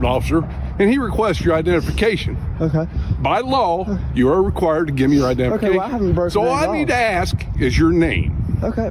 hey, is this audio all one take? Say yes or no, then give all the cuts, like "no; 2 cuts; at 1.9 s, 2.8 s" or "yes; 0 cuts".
yes; 0 cuts